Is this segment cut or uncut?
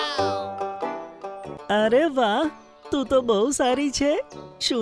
cut